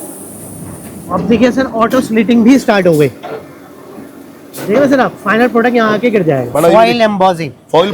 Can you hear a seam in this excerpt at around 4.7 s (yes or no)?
no